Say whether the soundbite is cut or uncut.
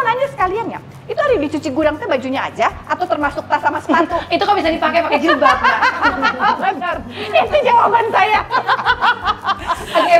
uncut